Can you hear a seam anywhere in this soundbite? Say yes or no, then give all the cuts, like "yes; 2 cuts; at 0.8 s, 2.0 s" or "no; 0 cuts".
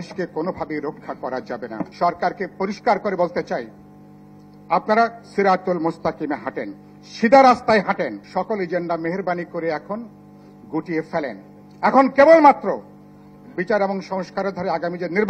yes; 2 cuts; at 1.9 s, 8.2 s